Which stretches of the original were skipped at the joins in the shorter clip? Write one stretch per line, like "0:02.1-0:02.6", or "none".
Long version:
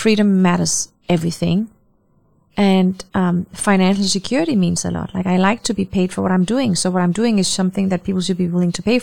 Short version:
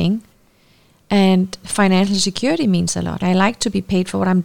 0:03.0-0:03.5
0:05.0-0:05.2